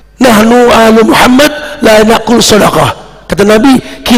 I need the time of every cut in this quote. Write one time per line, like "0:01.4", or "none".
none